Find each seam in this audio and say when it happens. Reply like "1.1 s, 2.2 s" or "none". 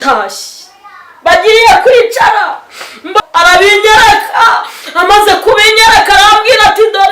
3.2 s